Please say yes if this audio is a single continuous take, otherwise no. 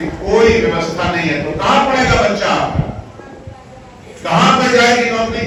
yes